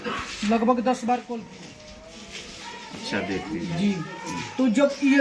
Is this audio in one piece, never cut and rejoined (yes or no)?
no